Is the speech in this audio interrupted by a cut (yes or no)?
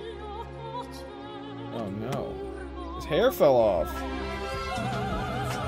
no